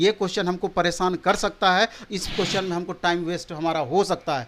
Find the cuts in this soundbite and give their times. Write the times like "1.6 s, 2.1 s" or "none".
none